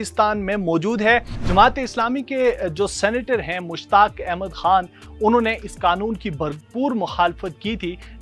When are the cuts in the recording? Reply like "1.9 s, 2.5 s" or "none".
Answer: 1.4 s